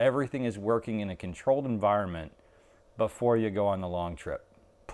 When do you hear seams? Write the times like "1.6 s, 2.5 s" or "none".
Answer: none